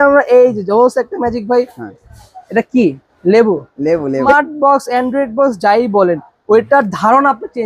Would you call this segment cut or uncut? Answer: cut